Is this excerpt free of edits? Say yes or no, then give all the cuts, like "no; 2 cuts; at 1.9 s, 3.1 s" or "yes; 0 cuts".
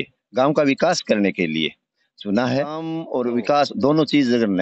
no; 1 cut; at 3.0 s